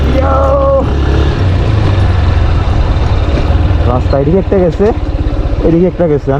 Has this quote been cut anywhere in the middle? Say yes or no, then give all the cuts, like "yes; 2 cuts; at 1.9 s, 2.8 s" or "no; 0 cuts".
yes; 1 cut; at 3.5 s